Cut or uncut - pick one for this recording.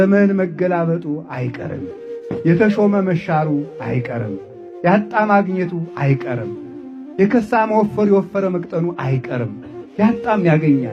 uncut